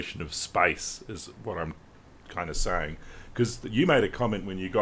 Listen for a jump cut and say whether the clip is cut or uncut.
uncut